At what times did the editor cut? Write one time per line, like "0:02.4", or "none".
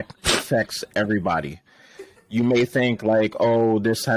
none